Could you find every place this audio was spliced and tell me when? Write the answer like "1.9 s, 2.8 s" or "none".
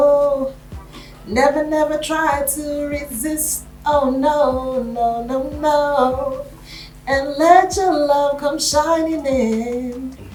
none